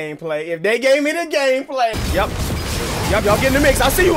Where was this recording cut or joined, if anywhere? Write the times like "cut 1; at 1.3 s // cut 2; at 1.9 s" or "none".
cut 1; at 2.0 s